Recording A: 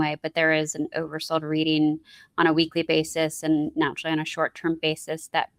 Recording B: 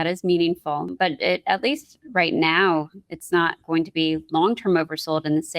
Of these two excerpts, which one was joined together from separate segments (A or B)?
B